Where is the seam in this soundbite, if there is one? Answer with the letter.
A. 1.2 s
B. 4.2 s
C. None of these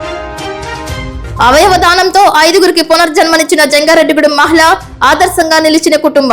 A